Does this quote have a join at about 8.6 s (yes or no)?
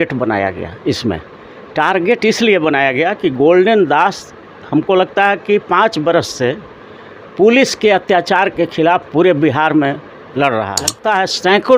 no